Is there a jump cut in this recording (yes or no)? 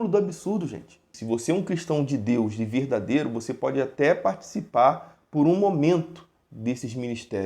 yes